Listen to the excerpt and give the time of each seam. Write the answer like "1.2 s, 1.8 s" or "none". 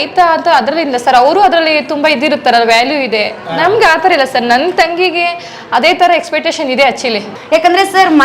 7.4 s

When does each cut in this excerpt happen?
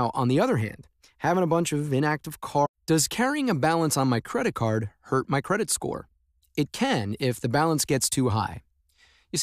none

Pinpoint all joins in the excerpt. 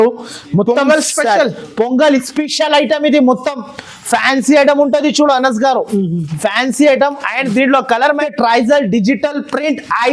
8.2 s

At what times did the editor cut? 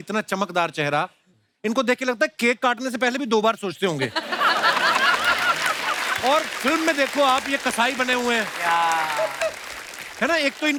none

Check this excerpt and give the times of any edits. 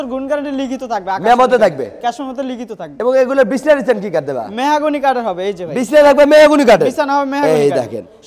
none

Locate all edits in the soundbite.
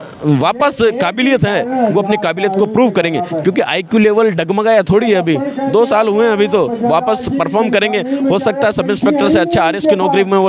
none

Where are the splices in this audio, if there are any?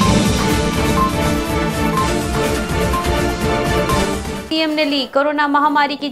4.4 s

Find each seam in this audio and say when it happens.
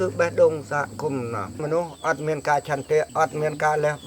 1.6 s

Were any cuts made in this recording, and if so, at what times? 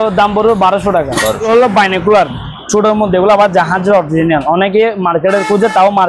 1.4 s

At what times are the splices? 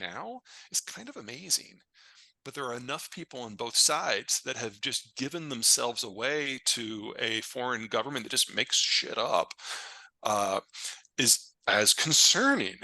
none

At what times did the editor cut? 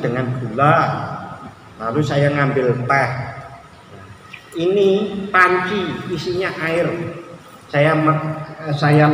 none

